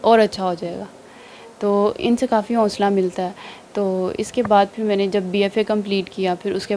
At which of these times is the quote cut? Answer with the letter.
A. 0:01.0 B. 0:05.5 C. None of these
C